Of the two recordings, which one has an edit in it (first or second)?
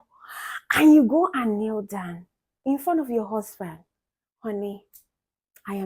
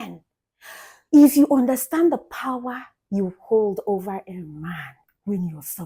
first